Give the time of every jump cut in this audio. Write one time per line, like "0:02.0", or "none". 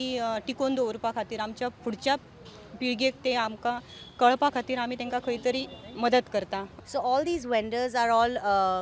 0:06.7